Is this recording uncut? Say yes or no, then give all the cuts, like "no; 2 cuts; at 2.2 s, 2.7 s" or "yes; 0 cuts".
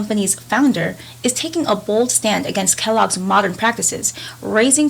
yes; 0 cuts